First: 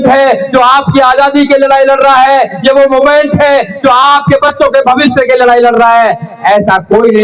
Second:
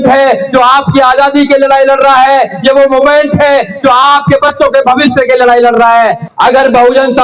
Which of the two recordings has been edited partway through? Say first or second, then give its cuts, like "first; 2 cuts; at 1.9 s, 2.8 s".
second; 1 cut; at 6.2 s